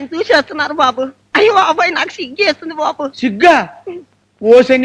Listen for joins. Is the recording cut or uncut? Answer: uncut